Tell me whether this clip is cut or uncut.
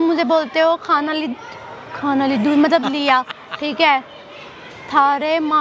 uncut